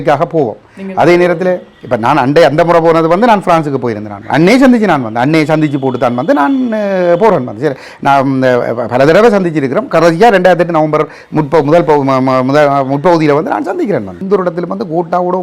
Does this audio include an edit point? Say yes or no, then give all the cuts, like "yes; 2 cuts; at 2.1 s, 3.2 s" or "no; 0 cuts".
yes; 2 cuts; at 4.3 s, 14.2 s